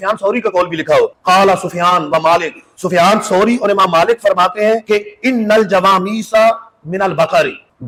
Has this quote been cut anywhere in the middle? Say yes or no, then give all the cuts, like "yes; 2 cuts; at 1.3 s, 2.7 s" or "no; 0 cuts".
no; 0 cuts